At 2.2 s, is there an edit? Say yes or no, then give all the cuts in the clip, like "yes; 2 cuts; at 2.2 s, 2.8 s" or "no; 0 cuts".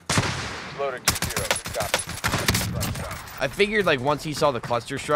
no; 1 cut; at 3.4 s